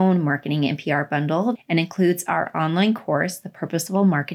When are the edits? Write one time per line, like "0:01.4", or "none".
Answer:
0:01.6

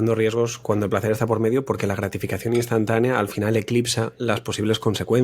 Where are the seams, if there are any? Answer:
none

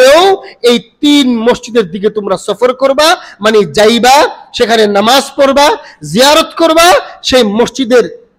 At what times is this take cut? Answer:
none

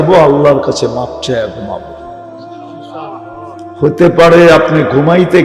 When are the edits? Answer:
none

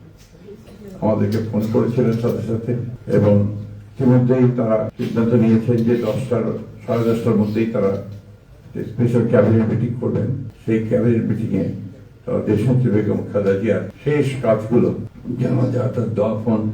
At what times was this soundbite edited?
0:05.0
0:10.5
0:13.9
0:15.1

